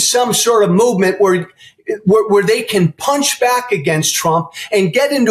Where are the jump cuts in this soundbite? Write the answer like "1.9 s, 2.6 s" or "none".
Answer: none